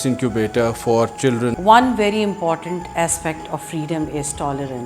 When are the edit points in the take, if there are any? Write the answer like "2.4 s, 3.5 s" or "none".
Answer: 1.6 s